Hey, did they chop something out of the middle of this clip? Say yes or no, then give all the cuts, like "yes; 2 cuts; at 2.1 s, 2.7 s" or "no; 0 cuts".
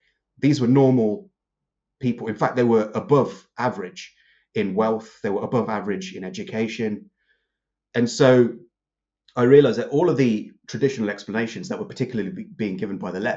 no; 0 cuts